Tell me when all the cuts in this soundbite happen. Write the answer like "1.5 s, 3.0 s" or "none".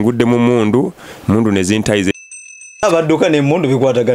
2.2 s